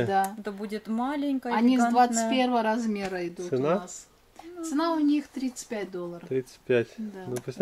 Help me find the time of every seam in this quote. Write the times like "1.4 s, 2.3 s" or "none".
none